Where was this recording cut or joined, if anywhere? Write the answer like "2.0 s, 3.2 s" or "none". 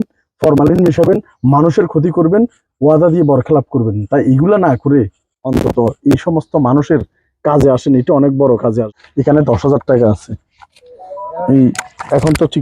8.9 s